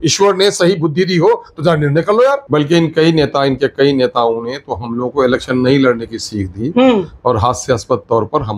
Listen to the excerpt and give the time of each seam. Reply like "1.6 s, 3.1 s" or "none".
2.4 s